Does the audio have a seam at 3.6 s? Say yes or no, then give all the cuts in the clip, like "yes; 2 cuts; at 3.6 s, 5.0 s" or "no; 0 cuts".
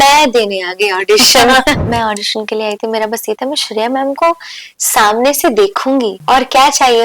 no; 2 cuts; at 1.8 s, 6.2 s